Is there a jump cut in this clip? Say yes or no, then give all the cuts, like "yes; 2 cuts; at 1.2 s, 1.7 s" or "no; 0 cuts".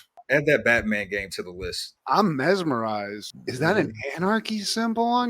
yes; 1 cut; at 1.9 s